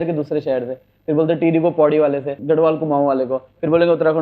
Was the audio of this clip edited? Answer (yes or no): yes